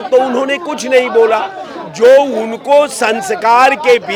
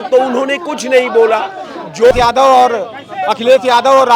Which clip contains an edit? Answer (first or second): second